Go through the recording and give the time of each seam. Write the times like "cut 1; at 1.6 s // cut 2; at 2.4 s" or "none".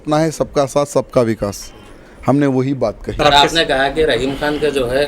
cut 1; at 3.1 s